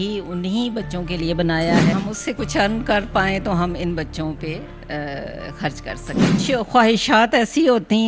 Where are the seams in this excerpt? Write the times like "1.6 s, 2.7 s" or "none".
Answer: 1.9 s, 6.4 s